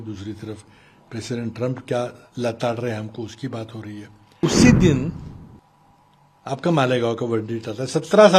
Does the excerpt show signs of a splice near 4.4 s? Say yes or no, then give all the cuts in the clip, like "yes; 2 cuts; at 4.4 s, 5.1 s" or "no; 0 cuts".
yes; 1 cut; at 4.4 s